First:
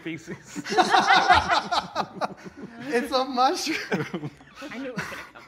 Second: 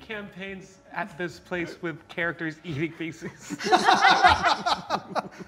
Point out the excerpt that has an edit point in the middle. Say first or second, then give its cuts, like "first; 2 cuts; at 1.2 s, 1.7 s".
first; 1 cut; at 4.5 s